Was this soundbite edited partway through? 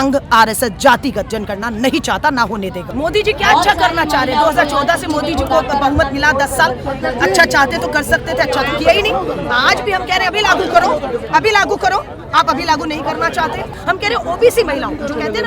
yes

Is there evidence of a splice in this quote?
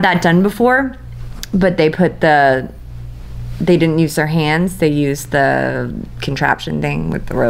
no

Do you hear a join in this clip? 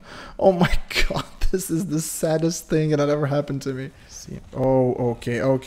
yes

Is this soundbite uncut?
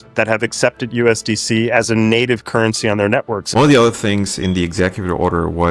no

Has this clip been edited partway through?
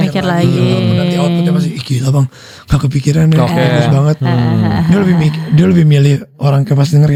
no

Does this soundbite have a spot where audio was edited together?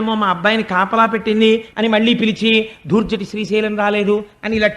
yes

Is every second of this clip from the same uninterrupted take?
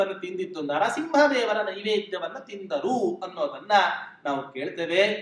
yes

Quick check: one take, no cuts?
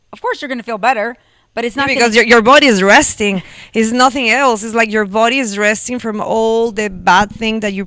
yes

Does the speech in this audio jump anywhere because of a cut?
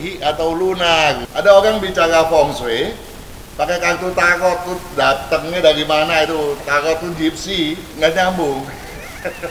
yes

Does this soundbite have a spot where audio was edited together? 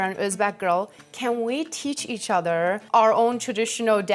no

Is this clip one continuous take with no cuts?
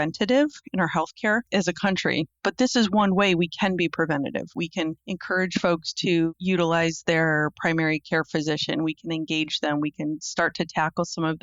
no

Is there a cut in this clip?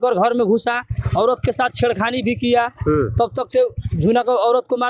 no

